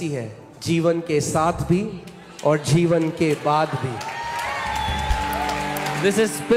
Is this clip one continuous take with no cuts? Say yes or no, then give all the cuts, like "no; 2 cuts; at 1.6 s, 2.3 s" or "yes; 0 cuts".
yes; 0 cuts